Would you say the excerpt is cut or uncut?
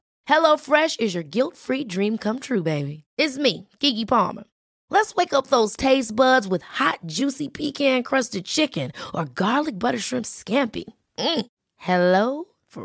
uncut